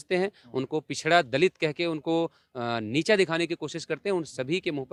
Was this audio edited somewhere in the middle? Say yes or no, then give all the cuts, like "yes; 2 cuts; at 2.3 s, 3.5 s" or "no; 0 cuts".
no; 0 cuts